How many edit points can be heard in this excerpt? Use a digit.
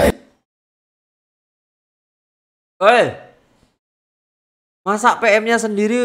0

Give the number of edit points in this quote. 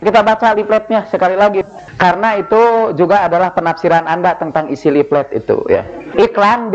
1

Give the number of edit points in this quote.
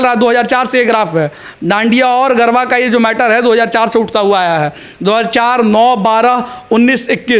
0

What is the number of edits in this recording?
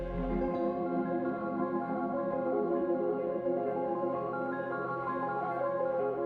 0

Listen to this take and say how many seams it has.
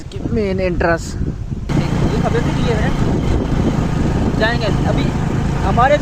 1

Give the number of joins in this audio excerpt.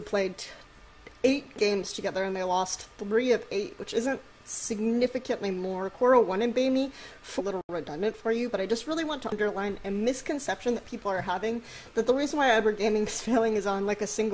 0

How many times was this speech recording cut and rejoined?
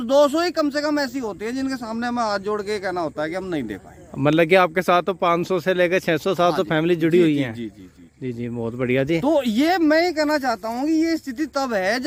0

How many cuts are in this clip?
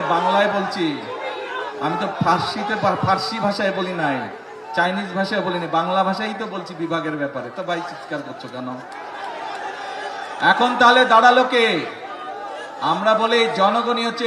0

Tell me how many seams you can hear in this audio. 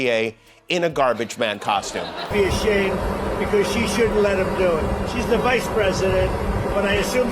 1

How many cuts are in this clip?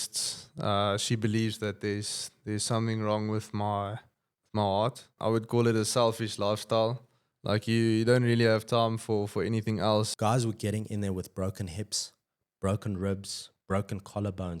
2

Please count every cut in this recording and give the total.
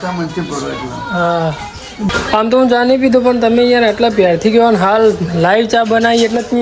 1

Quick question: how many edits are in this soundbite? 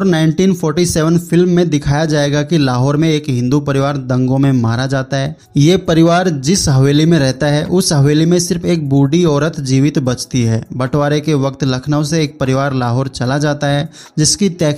1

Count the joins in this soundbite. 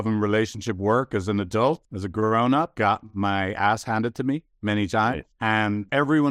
1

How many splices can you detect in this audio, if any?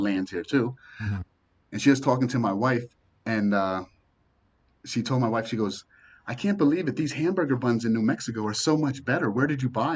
1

